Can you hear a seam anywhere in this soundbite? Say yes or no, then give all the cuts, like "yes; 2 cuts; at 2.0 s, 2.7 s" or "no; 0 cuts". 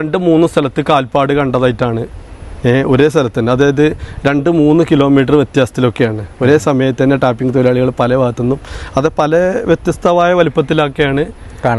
no; 0 cuts